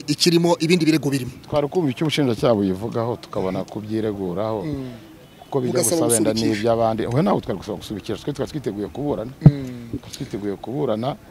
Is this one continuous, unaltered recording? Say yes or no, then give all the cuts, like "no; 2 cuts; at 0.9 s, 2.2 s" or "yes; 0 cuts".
yes; 0 cuts